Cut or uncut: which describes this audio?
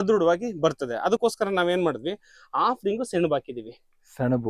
uncut